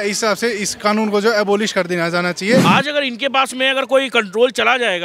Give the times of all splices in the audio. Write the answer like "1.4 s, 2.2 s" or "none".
2.6 s